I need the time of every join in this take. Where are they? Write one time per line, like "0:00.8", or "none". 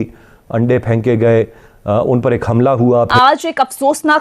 0:03.1